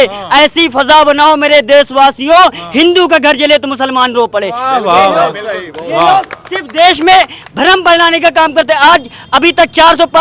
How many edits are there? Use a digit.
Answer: 0